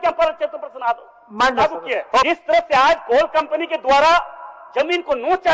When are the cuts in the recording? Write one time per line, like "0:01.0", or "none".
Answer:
0:02.2